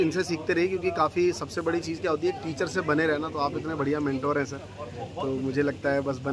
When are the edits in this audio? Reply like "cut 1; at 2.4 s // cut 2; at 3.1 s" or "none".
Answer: none